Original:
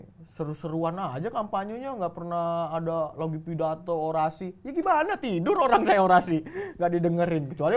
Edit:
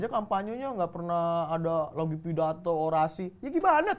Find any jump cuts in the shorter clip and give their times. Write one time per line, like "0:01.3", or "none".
none